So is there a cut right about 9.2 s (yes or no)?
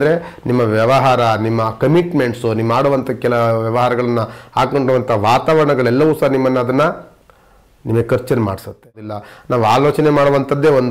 yes